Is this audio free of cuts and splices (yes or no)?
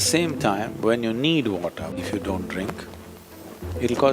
no